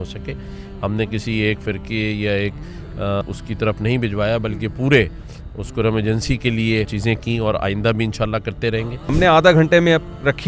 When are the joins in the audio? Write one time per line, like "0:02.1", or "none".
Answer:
0:03.2
0:06.9
0:09.1